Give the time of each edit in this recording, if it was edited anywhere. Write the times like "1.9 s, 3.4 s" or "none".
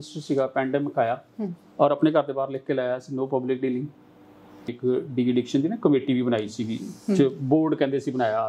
4.8 s